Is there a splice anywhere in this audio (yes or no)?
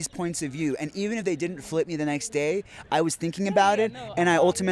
no